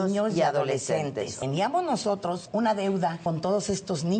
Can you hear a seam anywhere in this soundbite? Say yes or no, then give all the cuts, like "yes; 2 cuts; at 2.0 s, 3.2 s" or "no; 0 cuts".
yes; 3 cuts; at 1.3 s, 2.5 s, 3.2 s